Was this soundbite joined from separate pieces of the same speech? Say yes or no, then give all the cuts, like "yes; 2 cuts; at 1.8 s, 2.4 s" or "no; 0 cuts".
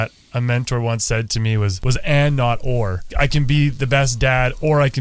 yes; 2 cuts; at 1.8 s, 3.0 s